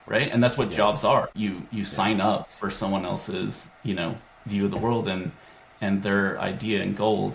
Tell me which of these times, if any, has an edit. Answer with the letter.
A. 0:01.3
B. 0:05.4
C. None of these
A